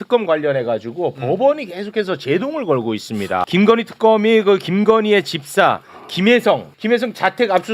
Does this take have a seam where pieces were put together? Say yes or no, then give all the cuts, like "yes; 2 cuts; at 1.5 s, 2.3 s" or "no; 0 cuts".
yes; 2 cuts; at 3.4 s, 6.7 s